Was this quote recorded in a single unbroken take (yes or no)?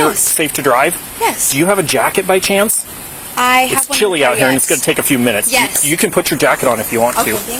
yes